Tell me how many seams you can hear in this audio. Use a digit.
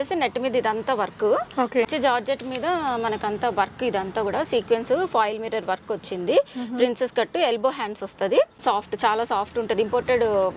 2